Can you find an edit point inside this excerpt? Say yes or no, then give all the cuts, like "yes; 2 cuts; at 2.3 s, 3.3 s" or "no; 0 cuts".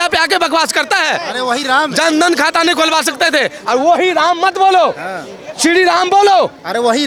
no; 0 cuts